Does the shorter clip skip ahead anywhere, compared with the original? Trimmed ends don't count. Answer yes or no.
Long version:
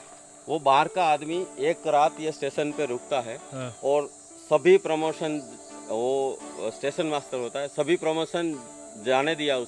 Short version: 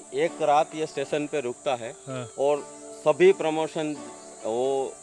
no